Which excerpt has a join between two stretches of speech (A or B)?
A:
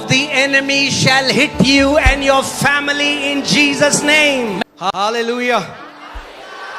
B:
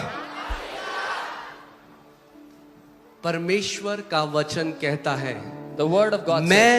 A